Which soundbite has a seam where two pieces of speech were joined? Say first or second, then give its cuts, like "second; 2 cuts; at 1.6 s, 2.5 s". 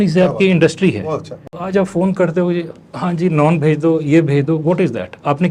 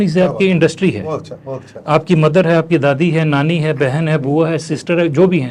first; 1 cut; at 1.6 s